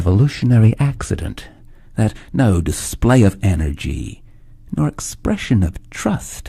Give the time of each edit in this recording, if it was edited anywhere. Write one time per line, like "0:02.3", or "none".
0:01.3